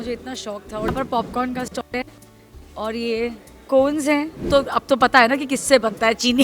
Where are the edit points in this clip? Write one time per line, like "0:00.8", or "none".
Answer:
0:00.9
0:04.5